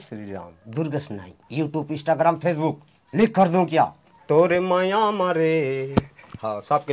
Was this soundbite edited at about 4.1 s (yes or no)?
yes